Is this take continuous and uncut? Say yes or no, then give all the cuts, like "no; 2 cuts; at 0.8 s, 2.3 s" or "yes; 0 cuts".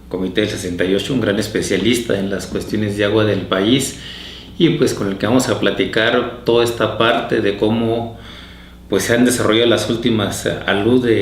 no; 1 cut; at 8.6 s